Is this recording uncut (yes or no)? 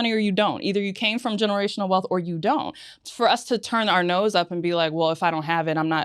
no